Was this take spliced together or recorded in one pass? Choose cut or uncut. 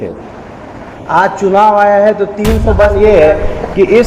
cut